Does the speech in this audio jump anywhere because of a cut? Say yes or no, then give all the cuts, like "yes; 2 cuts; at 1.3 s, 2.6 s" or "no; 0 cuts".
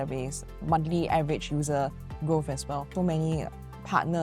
yes; 1 cut; at 2.9 s